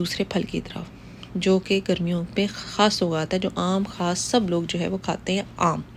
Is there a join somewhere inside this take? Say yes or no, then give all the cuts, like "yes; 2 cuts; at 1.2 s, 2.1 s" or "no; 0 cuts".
no; 0 cuts